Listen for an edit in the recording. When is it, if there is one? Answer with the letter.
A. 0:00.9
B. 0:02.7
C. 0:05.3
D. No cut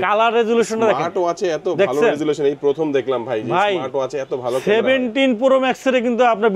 D